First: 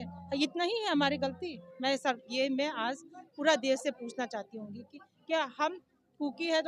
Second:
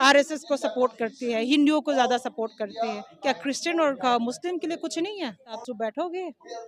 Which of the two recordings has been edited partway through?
second; 1 cut; at 5.5 s

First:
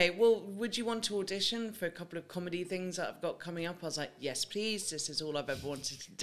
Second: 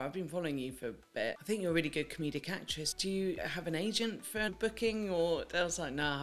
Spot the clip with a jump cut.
second; 3 cuts; at 1.4 s, 3.3 s, 4.5 s

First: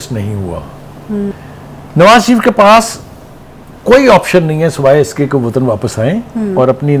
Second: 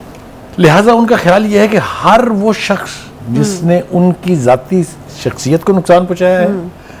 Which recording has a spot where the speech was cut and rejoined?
first; 1 cut; at 1.3 s

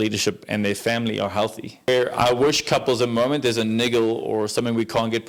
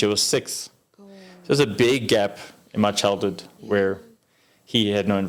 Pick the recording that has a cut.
first; 1 cut; at 1.9 s

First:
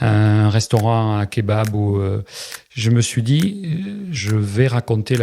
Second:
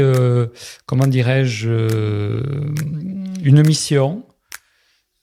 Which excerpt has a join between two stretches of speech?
first; 1 cut; at 4.2 s

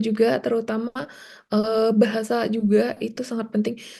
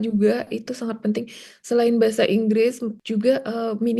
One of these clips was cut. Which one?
second; 1 cut; at 2.9 s

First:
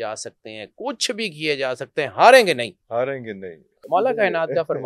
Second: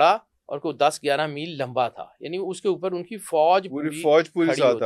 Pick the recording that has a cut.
first; 1 cut; at 3.7 s

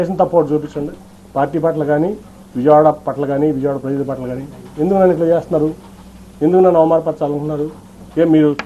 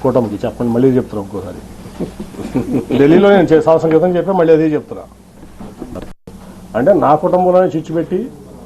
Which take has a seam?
second; 1 cut; at 6.3 s

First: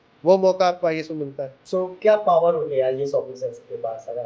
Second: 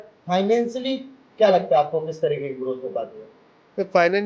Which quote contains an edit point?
first; 1 cut; at 1.6 s

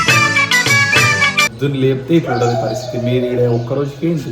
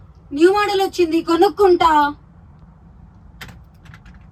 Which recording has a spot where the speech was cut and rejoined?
first; 1 cut; at 1.5 s

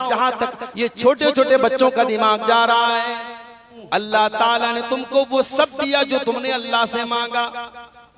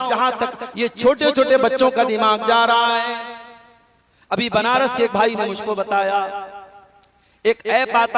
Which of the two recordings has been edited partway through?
first; 1 cut; at 3.7 s

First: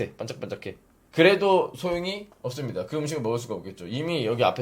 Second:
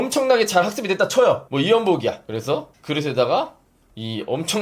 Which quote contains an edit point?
second; 2 cuts; at 1.5 s, 2.3 s

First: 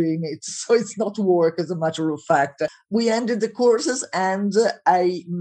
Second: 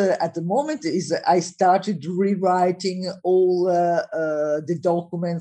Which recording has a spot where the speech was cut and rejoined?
first; 1 cut; at 2.8 s

